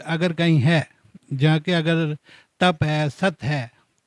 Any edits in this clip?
no; 0 cuts

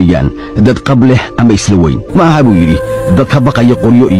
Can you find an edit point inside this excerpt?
no; 0 cuts

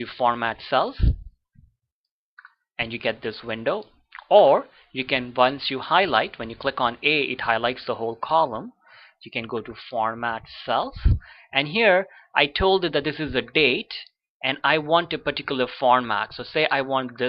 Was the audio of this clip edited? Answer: no; 0 cuts

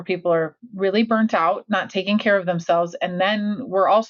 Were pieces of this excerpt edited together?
no; 0 cuts

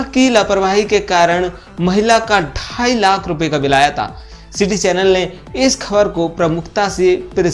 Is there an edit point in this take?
no; 0 cuts

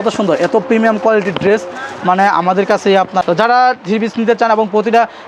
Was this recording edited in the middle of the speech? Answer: yes; 1 cut; at 3.3 s

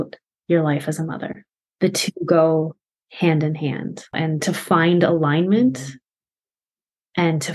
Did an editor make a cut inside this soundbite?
yes; 2 cuts; at 1.6 s, 4.2 s

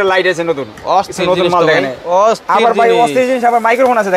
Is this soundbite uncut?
no; 1 cut; at 2.0 s

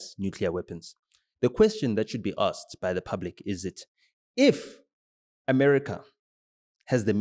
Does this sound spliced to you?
no; 0 cuts

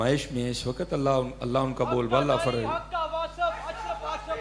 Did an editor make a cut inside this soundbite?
no; 0 cuts

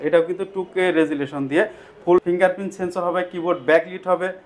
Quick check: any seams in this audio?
yes; 1 cut; at 2.2 s

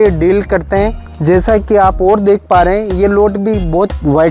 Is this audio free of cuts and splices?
yes; 0 cuts

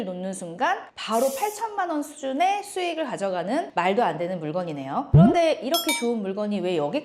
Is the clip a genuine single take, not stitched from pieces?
yes; 0 cuts

